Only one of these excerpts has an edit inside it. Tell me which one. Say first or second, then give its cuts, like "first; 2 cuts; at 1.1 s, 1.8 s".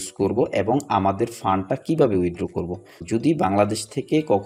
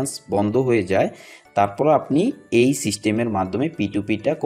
first; 1 cut; at 3.0 s